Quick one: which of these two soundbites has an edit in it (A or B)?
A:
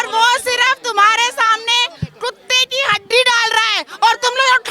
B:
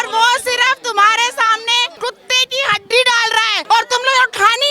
B